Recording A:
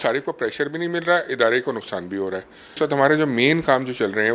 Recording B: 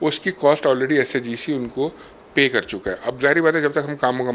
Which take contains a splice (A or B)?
A